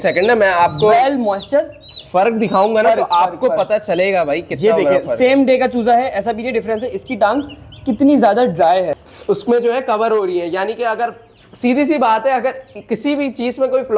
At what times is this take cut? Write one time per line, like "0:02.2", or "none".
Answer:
0:09.1